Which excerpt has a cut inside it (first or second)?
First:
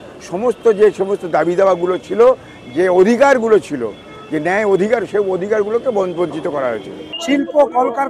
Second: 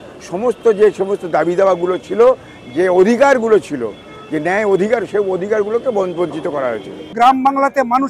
first